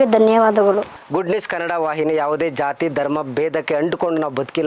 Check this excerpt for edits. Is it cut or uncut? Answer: cut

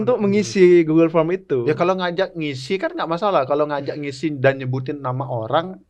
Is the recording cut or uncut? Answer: uncut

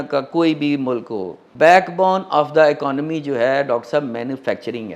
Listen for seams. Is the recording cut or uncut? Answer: cut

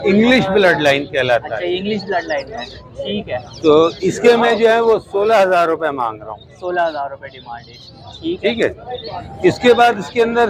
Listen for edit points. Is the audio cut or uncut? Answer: uncut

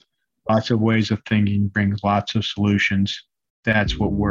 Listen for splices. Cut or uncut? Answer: uncut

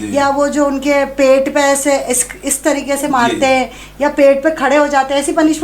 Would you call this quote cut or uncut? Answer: uncut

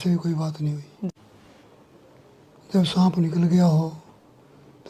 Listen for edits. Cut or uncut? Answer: cut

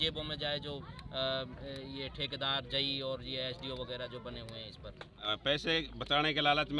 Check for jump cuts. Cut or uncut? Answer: cut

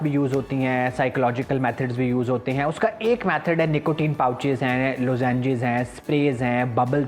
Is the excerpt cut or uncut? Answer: uncut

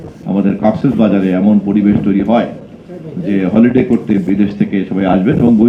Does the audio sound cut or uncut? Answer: uncut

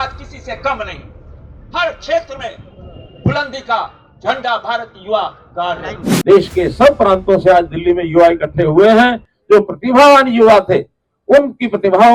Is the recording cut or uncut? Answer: cut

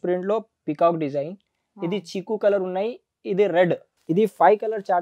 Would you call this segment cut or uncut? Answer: cut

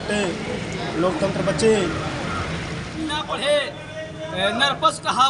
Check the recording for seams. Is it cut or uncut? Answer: cut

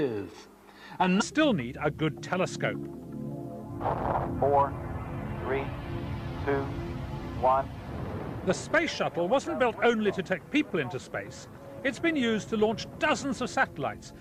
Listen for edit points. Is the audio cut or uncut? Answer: uncut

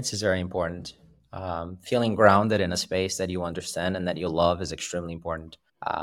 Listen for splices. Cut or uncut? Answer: uncut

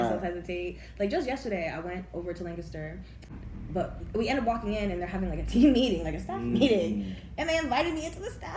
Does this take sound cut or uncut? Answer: cut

